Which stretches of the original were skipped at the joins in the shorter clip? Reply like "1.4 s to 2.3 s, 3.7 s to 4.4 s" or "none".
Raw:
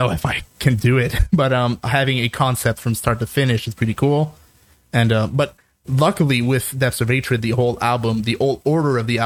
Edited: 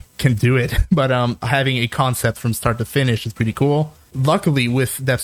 4.5 s to 5.8 s